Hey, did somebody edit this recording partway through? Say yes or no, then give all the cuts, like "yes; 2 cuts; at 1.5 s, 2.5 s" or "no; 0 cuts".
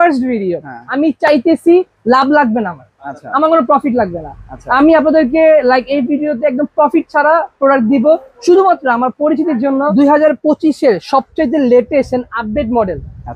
yes; 1 cut; at 9.9 s